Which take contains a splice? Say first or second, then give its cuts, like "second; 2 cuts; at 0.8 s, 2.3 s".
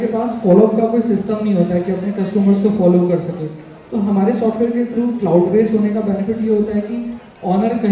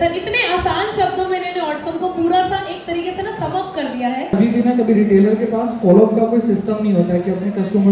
second; 1 cut; at 4.3 s